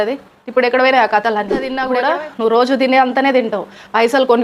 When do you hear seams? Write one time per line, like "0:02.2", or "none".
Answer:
0:01.8